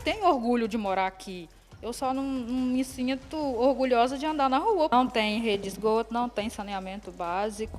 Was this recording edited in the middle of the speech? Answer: yes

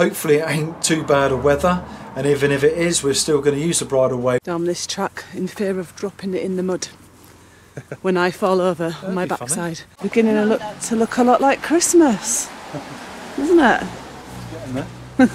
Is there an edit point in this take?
yes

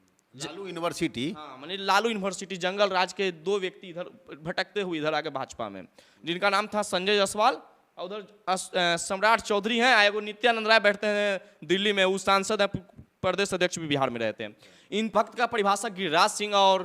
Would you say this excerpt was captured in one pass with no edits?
no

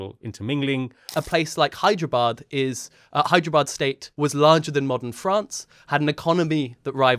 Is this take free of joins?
no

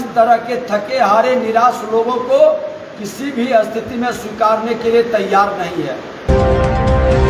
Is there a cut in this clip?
yes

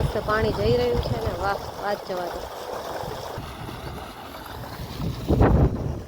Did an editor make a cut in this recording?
yes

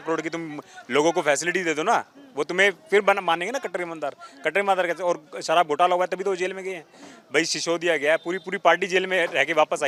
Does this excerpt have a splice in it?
no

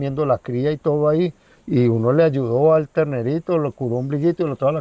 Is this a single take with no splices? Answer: yes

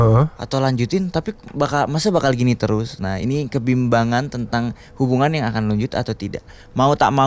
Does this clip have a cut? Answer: no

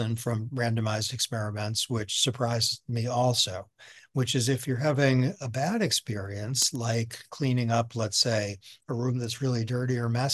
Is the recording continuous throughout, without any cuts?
yes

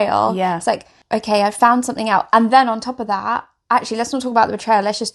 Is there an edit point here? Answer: yes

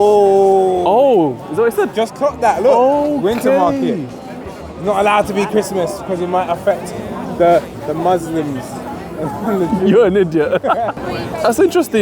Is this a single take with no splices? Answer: no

